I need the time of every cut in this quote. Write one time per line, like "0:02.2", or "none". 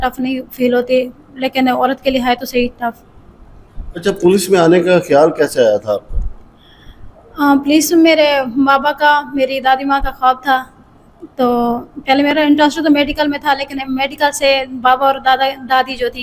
none